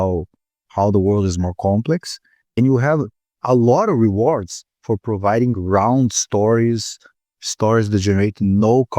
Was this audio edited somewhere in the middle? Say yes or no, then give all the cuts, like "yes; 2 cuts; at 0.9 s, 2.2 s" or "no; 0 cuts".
yes; 1 cut; at 4.9 s